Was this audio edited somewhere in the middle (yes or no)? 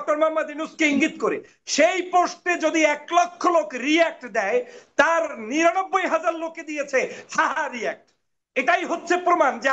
no